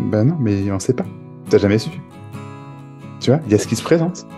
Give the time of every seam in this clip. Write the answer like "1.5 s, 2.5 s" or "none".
none